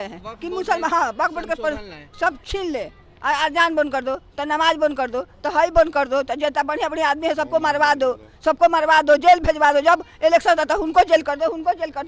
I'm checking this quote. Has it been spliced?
no; 0 cuts

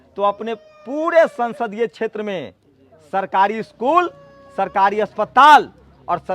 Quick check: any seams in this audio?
no; 0 cuts

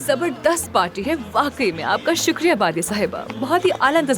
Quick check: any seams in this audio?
no; 0 cuts

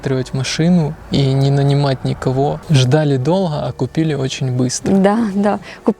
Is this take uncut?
no; 1 cut; at 2.6 s

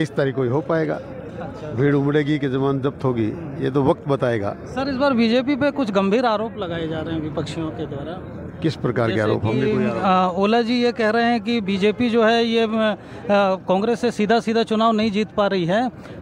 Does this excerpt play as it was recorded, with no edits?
yes; 0 cuts

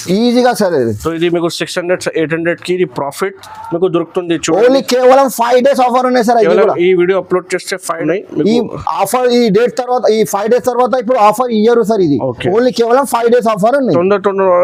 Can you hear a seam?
no; 0 cuts

